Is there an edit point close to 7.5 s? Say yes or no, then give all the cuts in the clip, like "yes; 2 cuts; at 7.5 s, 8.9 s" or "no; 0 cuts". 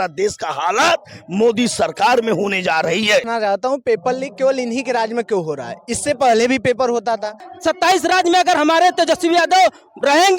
yes; 2 cuts; at 3.3 s, 7.5 s